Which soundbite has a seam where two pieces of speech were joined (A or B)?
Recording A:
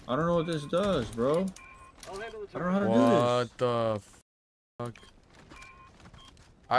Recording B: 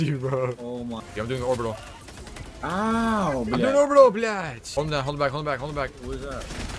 B